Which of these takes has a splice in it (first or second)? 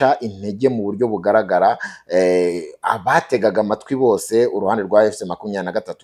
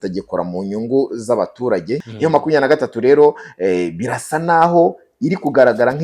second